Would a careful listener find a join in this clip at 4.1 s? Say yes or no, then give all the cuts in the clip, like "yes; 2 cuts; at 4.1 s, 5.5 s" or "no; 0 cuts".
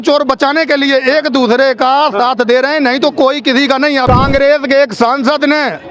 yes; 1 cut; at 4.1 s